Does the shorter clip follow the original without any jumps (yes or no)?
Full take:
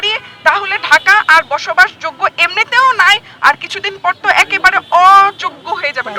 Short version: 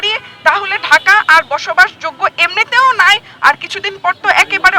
yes